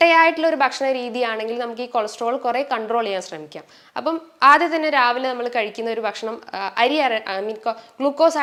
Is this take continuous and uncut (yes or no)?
yes